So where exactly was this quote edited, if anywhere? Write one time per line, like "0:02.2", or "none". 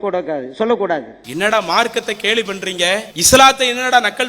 0:01.2
0:03.1